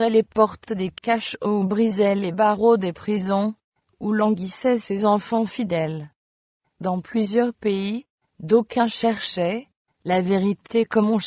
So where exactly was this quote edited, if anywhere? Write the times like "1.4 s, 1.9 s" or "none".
none